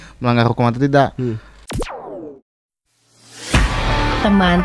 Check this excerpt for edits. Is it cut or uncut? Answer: cut